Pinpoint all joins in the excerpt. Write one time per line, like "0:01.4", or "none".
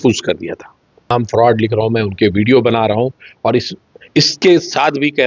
0:01.1